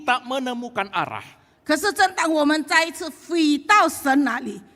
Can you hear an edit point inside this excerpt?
no; 0 cuts

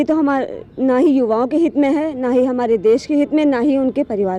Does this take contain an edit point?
no; 0 cuts

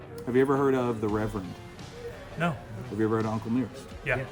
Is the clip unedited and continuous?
yes; 0 cuts

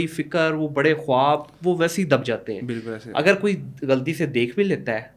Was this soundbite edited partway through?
no; 0 cuts

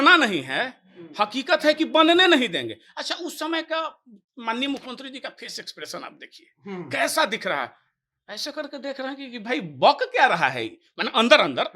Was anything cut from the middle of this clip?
no; 0 cuts

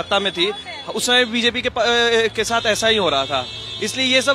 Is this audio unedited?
yes; 0 cuts

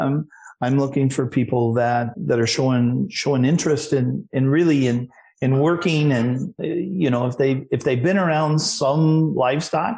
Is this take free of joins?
no; 2 cuts; at 2.1 s, 6.5 s

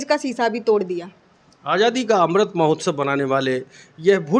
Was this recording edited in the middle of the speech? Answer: no; 0 cuts

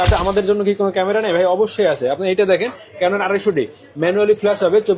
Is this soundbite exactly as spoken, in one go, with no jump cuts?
yes; 0 cuts

